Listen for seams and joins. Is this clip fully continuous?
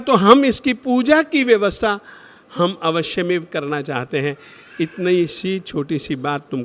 yes; 0 cuts

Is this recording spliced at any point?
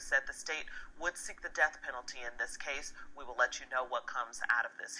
no; 0 cuts

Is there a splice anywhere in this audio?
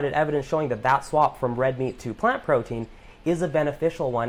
no; 0 cuts

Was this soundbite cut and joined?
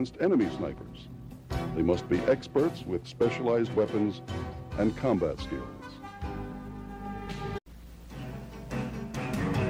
no; 0 cuts

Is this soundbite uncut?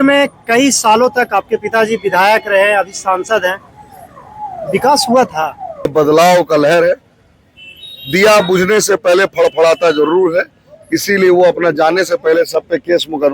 no; 1 cut; at 5.9 s

